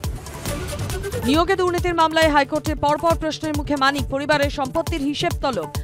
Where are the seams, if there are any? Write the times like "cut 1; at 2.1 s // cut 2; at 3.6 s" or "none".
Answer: cut 1; at 1.2 s